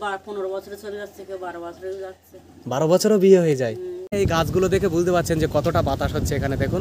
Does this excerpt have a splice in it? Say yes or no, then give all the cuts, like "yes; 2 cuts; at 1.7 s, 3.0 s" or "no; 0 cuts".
yes; 1 cut; at 4.1 s